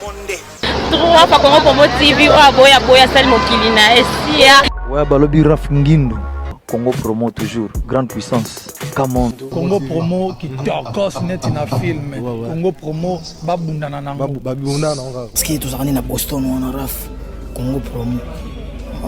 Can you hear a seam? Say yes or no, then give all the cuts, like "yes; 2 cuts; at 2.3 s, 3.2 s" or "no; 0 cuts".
no; 0 cuts